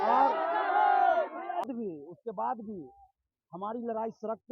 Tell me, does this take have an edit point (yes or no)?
yes